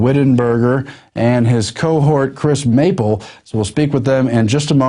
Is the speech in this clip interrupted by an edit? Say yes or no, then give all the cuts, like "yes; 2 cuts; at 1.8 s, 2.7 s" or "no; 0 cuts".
yes; 1 cut; at 3.4 s